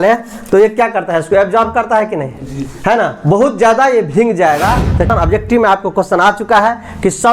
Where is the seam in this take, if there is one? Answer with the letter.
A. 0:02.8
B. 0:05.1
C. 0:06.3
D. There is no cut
B